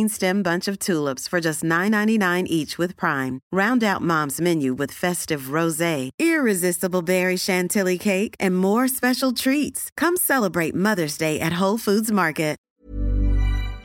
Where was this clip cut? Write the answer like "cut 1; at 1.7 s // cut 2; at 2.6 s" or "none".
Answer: cut 1; at 12.6 s

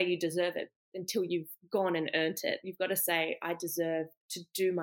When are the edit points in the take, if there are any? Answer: none

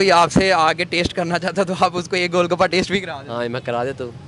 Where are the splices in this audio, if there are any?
none

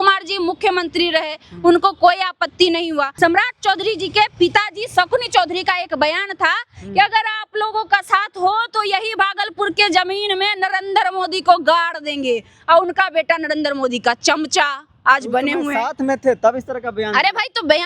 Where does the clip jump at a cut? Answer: cut 1; at 3.1 s

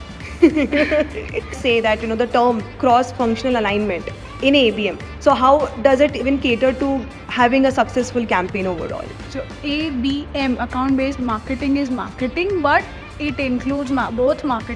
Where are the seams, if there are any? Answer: cut 1; at 1.5 s

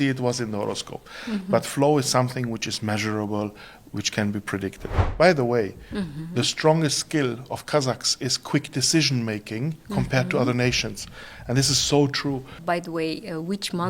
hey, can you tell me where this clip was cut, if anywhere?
cut 1; at 5.0 s // cut 2; at 12.5 s

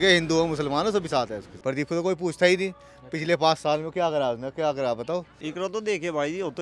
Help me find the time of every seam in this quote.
cut 1; at 1.5 s // cut 2; at 5.4 s

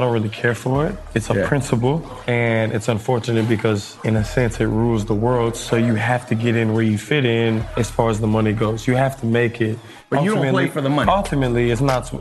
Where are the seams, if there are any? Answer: cut 1; at 2.1 s // cut 2; at 3.9 s // cut 3; at 7.7 s // cut 4; at 9.9 s

